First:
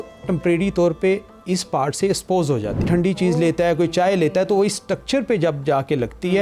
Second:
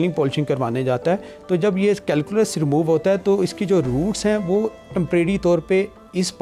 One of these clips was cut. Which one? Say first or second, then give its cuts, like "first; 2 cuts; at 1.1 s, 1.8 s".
first; 1 cut; at 2.8 s